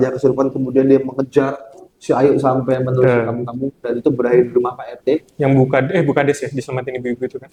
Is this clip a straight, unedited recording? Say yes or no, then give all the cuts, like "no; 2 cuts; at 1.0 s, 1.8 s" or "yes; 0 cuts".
yes; 0 cuts